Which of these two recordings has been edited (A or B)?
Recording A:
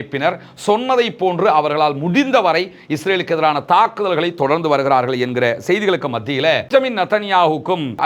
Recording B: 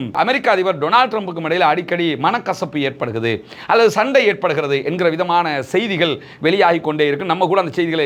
A